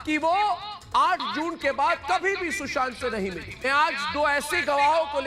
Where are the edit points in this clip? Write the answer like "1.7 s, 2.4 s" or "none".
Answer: 3.6 s

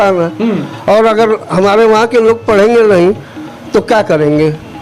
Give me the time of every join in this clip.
none

